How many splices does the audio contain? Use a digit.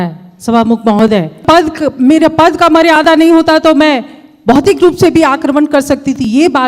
1